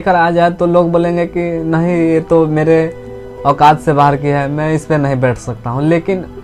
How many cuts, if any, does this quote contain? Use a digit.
0